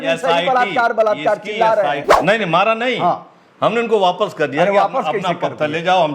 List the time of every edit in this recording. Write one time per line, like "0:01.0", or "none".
0:02.1